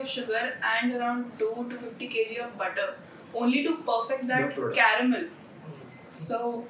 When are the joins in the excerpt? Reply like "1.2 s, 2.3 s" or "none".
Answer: none